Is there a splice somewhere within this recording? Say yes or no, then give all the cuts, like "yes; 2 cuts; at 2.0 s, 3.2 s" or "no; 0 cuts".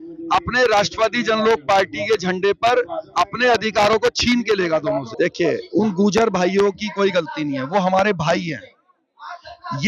yes; 1 cut; at 5.1 s